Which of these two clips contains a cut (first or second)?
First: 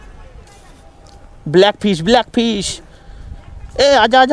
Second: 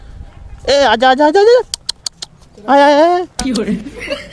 second